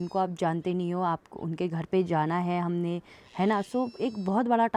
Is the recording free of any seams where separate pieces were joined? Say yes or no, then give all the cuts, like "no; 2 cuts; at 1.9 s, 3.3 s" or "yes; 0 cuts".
yes; 0 cuts